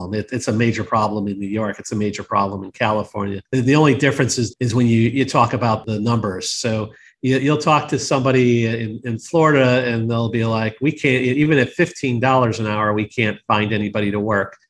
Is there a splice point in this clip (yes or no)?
yes